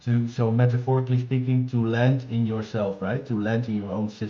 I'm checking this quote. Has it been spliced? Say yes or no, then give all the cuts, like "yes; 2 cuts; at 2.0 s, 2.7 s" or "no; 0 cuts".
no; 0 cuts